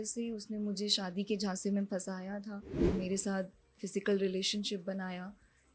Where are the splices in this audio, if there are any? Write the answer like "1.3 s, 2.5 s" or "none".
2.7 s